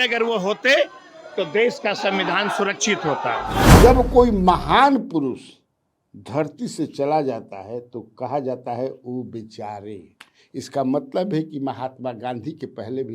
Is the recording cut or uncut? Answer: cut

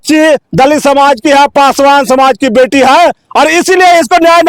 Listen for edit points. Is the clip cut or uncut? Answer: uncut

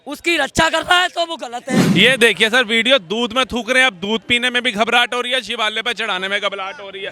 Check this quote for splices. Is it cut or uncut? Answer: cut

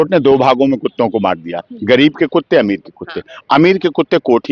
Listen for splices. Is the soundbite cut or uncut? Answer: uncut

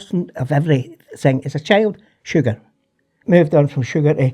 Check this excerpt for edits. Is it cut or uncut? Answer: cut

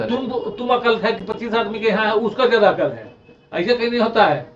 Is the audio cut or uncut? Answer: uncut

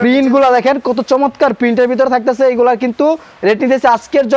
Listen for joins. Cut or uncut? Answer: uncut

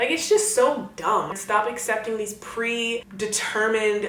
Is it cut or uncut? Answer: cut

